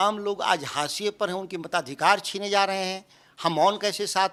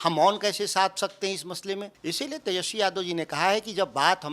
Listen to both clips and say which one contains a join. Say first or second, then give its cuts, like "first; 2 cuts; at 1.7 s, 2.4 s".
second; 1 cut; at 1.9 s